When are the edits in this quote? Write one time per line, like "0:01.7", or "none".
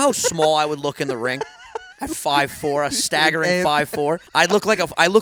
0:04.3